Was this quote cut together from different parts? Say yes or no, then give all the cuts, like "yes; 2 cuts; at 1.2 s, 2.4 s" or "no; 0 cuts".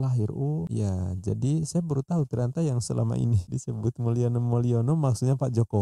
no; 0 cuts